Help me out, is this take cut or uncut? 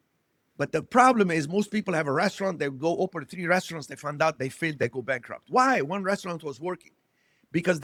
uncut